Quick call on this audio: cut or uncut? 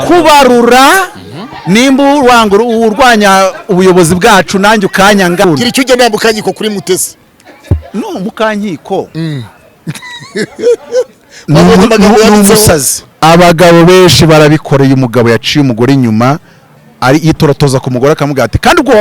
cut